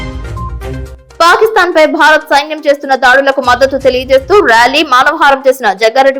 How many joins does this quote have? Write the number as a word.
one